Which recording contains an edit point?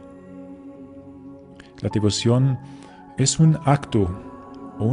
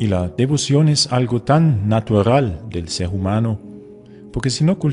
first; 1 cut; at 1.2 s

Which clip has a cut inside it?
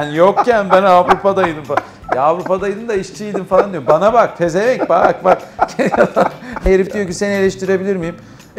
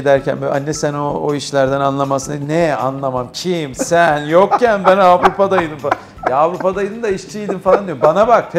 first; 1 cut; at 6.7 s

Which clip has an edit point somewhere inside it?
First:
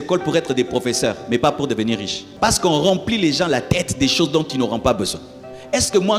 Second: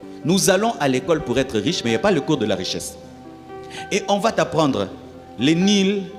first; 1 cut; at 2.2 s

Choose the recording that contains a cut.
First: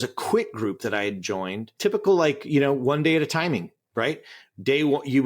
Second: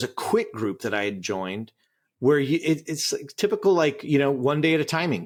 first; 1 cut; at 1.7 s

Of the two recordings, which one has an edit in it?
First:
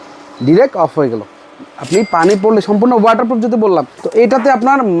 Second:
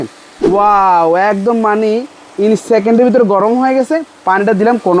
first; 1 cut; at 4.0 s

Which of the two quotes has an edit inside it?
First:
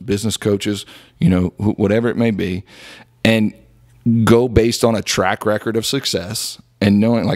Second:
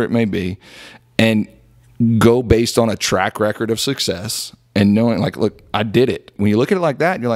second; 1 cut; at 6.4 s

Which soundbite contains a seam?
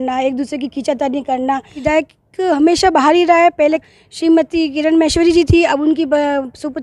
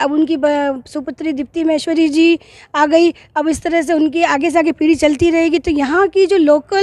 first; 2 cuts; at 1.8 s, 3.9 s

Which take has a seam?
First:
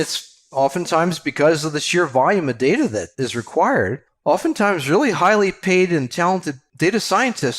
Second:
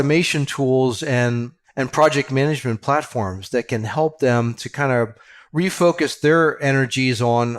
first; 3 cuts; at 3.1 s, 4.0 s, 6.6 s

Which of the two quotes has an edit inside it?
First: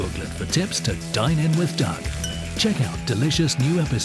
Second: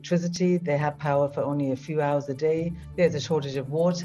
second; 1 cut; at 2.8 s

